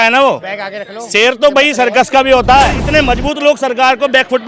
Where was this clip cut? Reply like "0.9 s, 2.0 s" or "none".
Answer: 2.8 s